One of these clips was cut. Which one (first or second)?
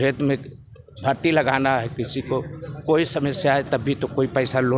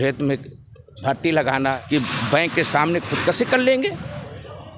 second